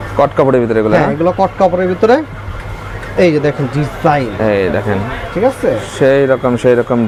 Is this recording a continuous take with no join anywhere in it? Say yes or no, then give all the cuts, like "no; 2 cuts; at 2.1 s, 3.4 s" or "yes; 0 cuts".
yes; 0 cuts